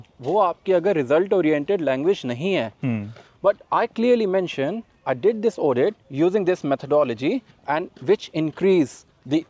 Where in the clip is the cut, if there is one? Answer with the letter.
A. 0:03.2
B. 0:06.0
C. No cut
A